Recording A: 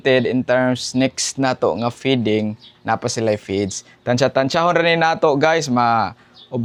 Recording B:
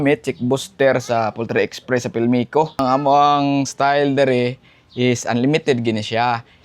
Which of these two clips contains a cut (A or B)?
B